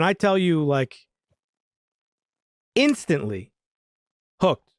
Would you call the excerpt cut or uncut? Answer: uncut